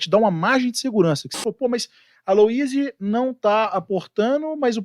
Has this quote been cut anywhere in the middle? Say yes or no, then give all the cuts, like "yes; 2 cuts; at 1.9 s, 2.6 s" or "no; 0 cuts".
yes; 1 cut; at 1.3 s